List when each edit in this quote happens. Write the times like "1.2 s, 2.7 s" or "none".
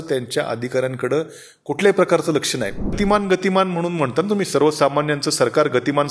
3.0 s